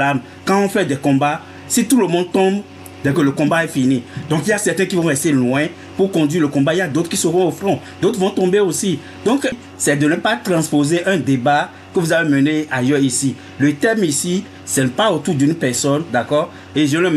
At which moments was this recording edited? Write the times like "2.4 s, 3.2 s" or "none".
9.7 s